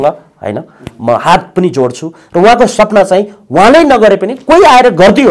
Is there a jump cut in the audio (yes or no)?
no